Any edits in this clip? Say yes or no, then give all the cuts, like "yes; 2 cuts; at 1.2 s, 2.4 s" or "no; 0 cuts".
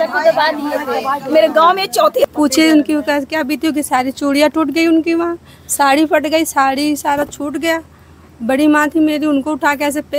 yes; 1 cut; at 2.3 s